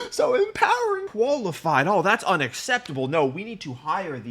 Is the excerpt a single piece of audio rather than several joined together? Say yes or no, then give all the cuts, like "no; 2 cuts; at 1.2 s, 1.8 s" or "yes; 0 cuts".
no; 1 cut; at 1.1 s